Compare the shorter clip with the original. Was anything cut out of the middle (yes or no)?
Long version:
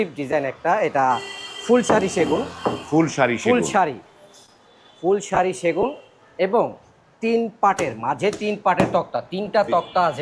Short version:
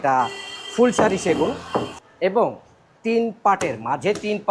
yes